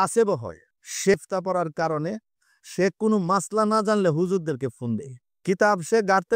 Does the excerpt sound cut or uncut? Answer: cut